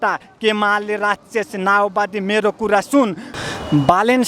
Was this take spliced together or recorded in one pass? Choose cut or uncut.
cut